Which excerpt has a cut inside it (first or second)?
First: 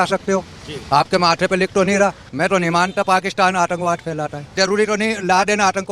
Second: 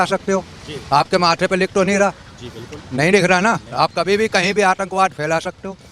first